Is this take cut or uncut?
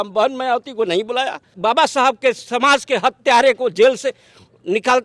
cut